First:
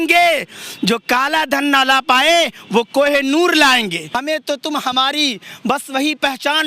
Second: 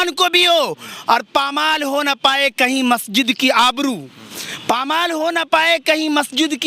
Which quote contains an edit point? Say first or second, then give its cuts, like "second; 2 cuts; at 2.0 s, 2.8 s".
first; 1 cut; at 4.1 s